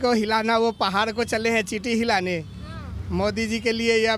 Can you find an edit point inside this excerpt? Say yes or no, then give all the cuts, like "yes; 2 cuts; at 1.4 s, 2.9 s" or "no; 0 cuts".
no; 0 cuts